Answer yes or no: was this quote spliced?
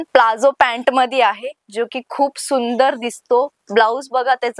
no